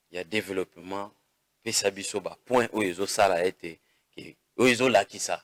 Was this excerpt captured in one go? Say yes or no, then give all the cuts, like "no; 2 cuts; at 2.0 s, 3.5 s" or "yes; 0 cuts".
yes; 0 cuts